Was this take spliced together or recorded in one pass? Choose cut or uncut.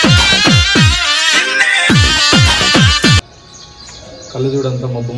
uncut